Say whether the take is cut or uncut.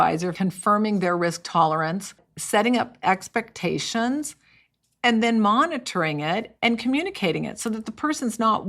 uncut